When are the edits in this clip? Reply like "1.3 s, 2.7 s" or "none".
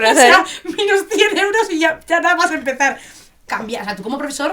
3.5 s